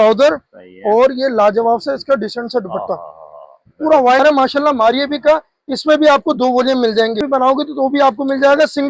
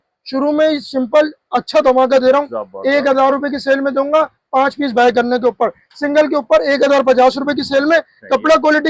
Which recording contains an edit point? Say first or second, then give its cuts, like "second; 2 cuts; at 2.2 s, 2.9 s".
first; 2 cuts; at 4.2 s, 7.2 s